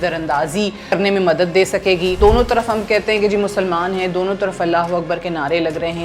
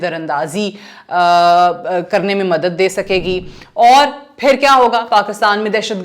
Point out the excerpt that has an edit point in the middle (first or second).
first